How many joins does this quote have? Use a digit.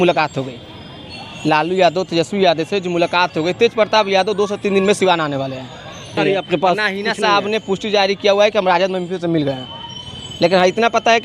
1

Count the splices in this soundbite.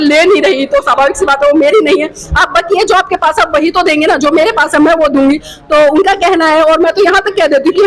0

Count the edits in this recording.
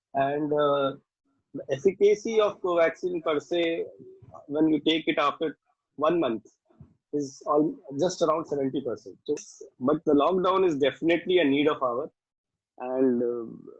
1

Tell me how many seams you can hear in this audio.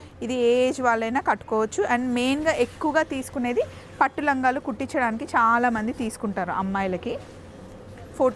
0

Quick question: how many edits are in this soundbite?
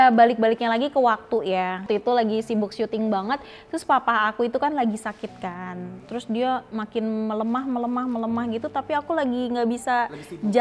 1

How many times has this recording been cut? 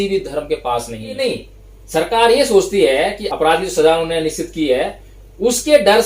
2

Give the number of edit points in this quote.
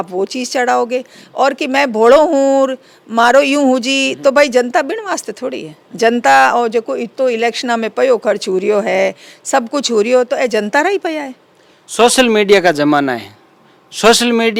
0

